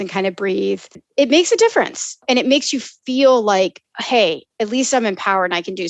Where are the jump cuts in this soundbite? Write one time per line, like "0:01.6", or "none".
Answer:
0:01.0
0:02.2